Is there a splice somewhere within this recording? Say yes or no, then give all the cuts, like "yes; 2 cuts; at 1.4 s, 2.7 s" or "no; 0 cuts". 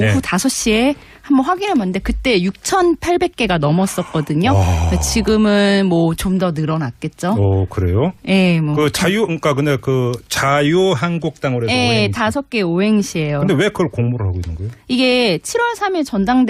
no; 0 cuts